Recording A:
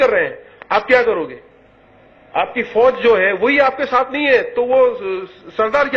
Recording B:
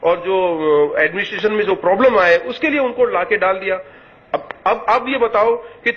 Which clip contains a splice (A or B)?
A